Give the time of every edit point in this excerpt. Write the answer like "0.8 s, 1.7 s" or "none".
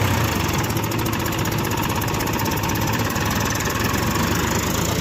none